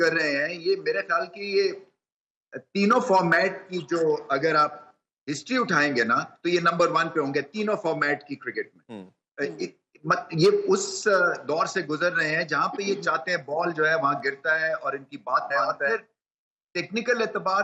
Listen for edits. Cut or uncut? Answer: uncut